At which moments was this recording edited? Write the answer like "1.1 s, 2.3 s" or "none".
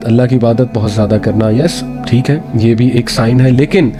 none

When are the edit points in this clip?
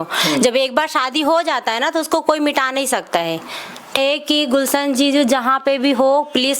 3.9 s

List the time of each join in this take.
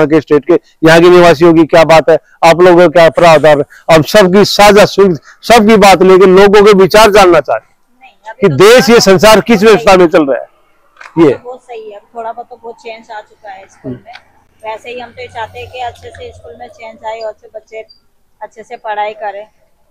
none

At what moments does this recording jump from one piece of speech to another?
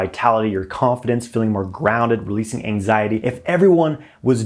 3.2 s

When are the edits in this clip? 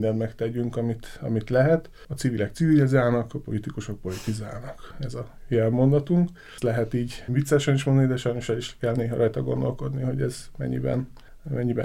none

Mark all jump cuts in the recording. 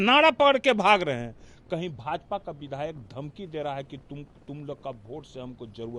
none

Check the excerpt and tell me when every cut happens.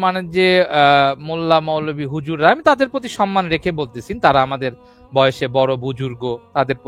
none

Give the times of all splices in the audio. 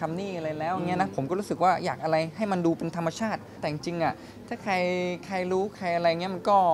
3.6 s

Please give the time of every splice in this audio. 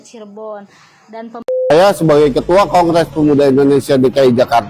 1.7 s

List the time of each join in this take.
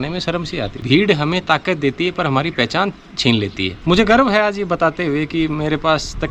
0.8 s, 3.7 s

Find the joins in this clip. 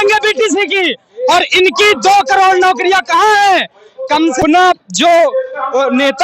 4.4 s

